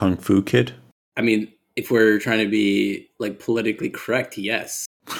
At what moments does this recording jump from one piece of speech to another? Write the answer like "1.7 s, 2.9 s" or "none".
none